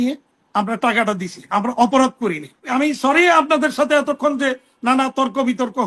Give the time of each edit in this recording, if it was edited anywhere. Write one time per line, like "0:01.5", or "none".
0:02.7